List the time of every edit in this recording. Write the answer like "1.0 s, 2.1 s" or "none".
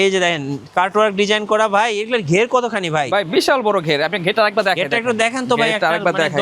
none